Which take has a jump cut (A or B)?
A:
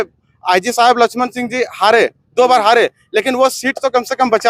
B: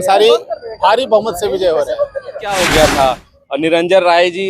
B